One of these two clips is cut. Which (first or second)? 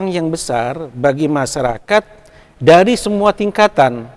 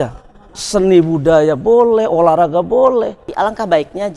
second